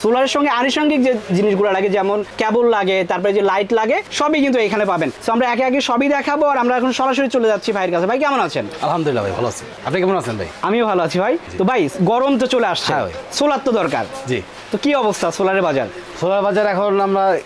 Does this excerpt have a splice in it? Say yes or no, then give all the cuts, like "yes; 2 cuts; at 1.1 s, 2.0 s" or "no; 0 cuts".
no; 0 cuts